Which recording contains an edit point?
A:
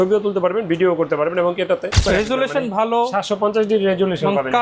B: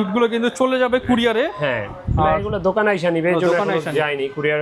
A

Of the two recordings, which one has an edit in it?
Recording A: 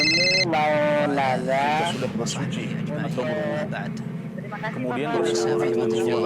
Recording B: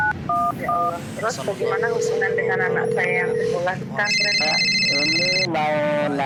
A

